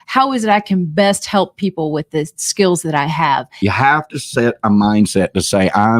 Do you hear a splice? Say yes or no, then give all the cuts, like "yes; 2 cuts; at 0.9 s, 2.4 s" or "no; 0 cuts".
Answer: yes; 1 cut; at 3.5 s